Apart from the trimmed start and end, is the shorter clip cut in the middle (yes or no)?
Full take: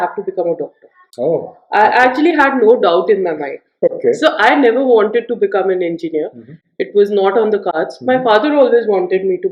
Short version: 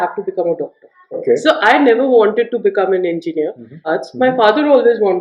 yes